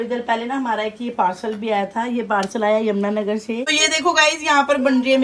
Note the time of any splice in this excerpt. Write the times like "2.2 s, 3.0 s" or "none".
3.7 s